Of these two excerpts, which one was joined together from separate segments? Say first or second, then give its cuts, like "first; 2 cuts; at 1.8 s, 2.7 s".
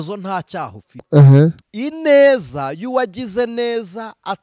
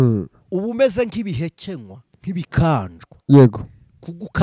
first; 1 cut; at 1.7 s